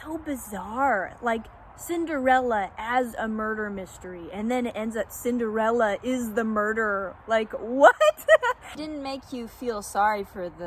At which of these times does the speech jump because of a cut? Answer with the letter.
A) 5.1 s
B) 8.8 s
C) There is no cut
B